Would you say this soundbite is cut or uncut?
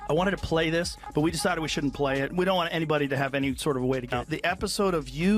cut